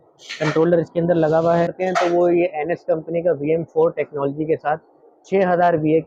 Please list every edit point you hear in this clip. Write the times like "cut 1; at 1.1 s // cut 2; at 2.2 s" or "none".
cut 1; at 1.8 s